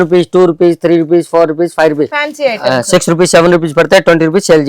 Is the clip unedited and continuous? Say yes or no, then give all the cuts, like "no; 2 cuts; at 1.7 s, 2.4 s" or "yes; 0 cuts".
no; 1 cut; at 2.1 s